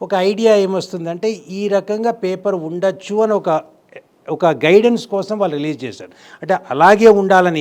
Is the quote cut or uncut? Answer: uncut